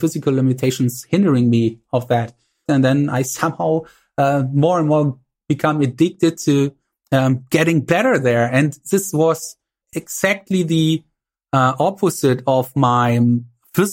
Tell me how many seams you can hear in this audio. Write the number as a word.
two